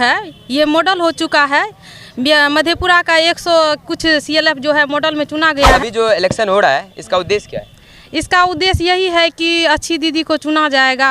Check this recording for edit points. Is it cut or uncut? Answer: cut